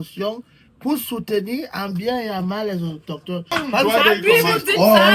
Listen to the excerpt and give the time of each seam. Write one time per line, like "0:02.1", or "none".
0:03.8